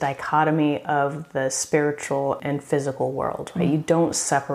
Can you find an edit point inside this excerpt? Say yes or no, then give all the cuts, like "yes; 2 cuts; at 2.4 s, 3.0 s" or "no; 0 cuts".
yes; 1 cut; at 2.4 s